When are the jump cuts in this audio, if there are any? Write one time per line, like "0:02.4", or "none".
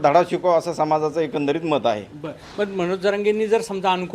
none